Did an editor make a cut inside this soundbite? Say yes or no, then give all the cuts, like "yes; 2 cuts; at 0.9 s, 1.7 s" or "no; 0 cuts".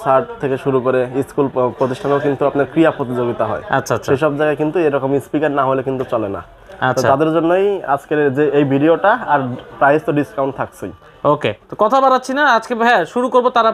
no; 0 cuts